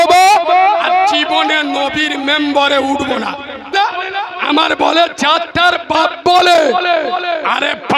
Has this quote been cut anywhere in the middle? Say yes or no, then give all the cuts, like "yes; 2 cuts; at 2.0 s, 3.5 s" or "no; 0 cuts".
yes; 1 cut; at 3.7 s